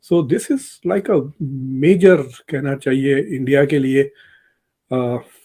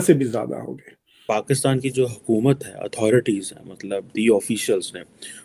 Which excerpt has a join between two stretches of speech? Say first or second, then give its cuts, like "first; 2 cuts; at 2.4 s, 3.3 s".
second; 1 cut; at 1.2 s